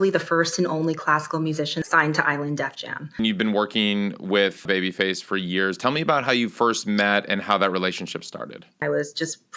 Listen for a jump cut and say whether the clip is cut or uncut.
cut